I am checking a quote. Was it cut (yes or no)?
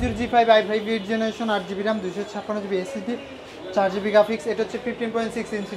no